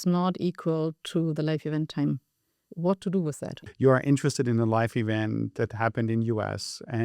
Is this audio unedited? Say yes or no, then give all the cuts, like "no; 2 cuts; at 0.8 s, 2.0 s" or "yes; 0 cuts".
no; 1 cut; at 3.5 s